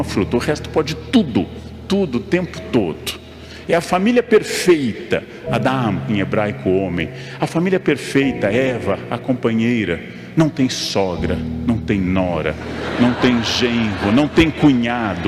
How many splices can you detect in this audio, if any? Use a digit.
0